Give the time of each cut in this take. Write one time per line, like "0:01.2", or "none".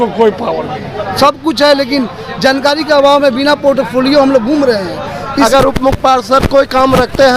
0:01.0
0:05.5